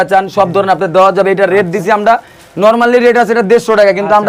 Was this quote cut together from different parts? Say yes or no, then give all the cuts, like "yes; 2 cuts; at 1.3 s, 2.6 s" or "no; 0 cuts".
no; 0 cuts